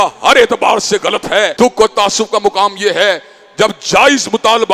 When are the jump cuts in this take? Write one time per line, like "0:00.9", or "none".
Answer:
0:01.5